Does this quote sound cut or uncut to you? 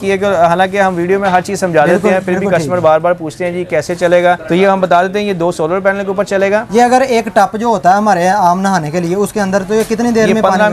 cut